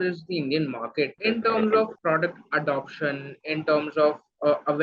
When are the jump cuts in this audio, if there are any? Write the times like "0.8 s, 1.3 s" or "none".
1.2 s, 1.9 s